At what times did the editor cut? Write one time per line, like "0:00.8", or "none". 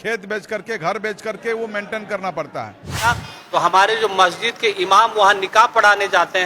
0:03.0